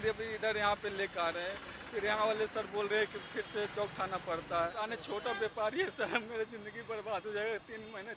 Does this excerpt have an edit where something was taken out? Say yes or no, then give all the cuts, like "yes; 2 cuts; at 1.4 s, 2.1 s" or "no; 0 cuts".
yes; 1 cut; at 4.8 s